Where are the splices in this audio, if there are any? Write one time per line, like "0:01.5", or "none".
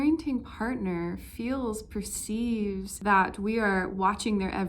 0:02.9